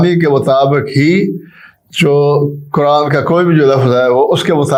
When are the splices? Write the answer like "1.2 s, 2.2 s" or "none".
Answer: none